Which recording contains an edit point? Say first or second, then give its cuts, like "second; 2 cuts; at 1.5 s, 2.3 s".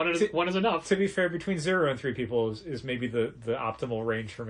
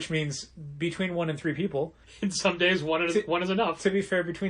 second; 1 cut; at 2.0 s